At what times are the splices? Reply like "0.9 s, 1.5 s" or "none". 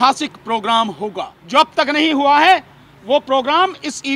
1.3 s